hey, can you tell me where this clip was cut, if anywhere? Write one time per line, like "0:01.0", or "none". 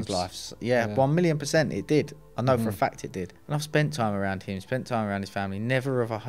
0:03.3